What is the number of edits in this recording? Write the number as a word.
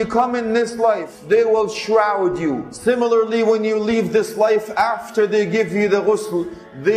two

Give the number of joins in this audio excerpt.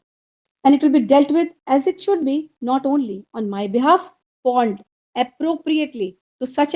one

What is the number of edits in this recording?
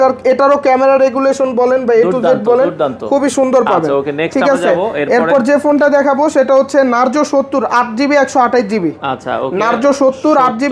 zero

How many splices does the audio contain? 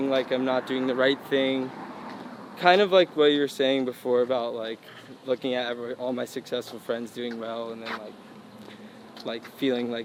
zero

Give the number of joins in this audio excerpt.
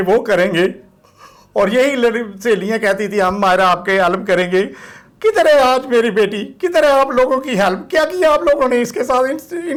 zero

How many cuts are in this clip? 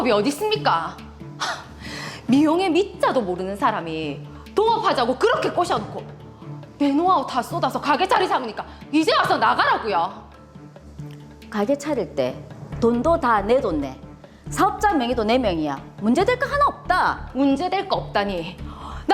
one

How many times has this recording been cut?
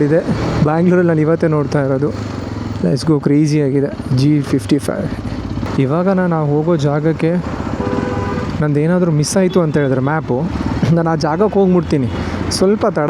one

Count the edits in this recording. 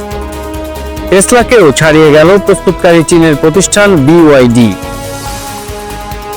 one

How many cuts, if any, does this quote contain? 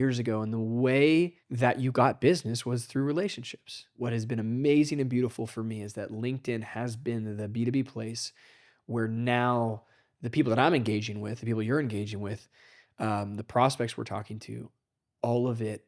two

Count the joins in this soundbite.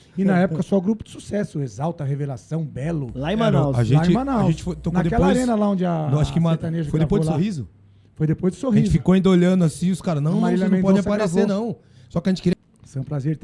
one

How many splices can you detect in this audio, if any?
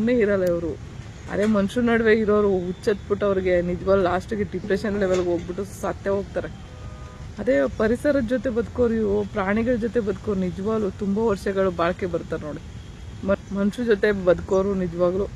zero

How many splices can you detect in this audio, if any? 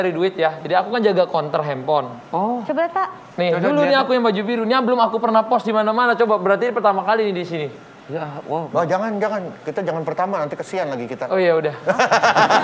zero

